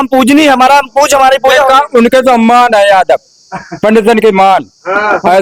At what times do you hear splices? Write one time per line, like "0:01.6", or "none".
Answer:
none